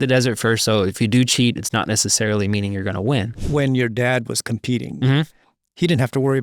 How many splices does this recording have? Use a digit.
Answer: 1